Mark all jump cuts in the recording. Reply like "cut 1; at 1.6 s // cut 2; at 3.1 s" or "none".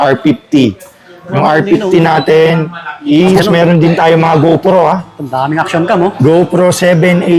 cut 1; at 3.4 s